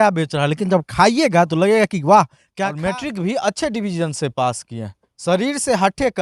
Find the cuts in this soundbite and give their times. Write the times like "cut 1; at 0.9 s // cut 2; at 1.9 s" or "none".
cut 1; at 2.4 s

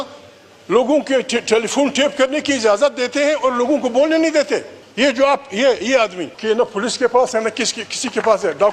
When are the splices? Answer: cut 1; at 4.8 s // cut 2; at 6.3 s

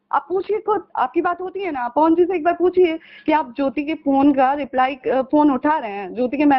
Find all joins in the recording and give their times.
none

